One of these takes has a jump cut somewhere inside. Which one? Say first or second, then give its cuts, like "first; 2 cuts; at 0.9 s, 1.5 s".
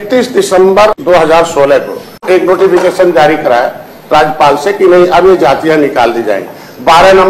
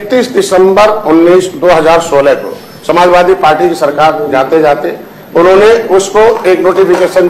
first; 2 cuts; at 1.0 s, 2.2 s